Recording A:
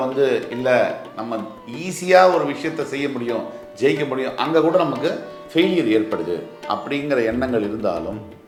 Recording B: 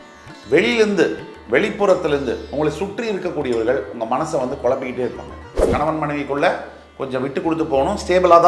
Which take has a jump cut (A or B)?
B